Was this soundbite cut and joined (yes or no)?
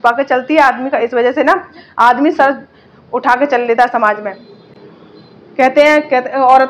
no